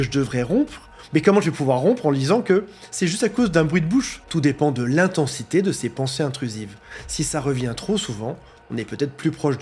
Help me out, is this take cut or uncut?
cut